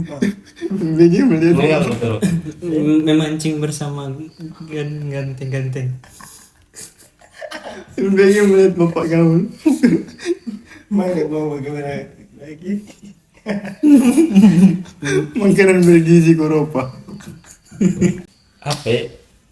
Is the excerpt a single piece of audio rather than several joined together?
no; 1 cut; at 18.3 s

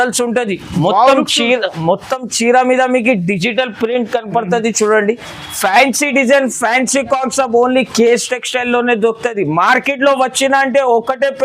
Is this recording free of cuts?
yes; 0 cuts

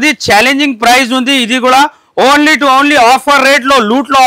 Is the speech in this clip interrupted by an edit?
no; 0 cuts

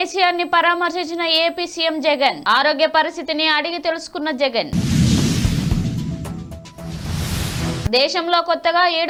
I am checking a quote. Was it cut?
no; 0 cuts

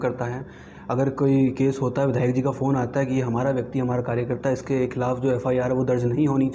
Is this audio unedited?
yes; 0 cuts

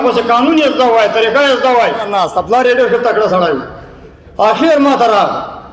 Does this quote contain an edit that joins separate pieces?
yes; 1 cut; at 2.1 s

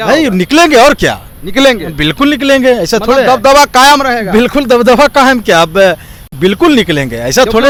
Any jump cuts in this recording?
no; 0 cuts

